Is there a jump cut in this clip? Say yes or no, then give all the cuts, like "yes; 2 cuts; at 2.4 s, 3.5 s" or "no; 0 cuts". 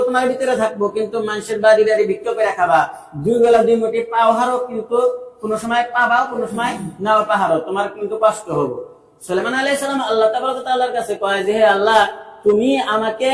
no; 0 cuts